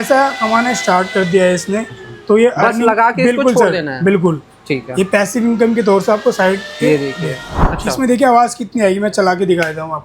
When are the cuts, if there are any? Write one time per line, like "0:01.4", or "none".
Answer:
0:07.7

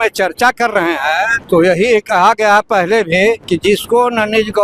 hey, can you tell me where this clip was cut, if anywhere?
0:01.4
0:03.4

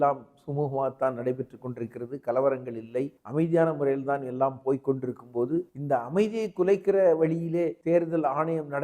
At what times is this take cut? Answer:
0:03.2
0:05.8
0:07.8

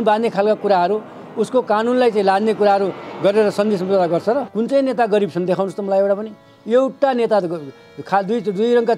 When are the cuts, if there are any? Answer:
0:04.5

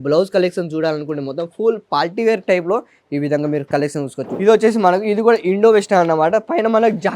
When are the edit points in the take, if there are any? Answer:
0:04.4

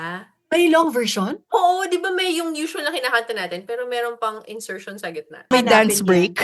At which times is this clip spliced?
0:05.4

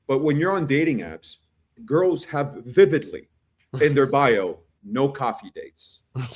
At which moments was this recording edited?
none

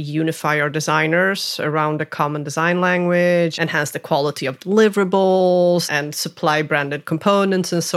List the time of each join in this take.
0:03.6
0:05.9

